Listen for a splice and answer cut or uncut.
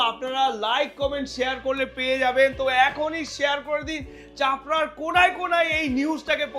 uncut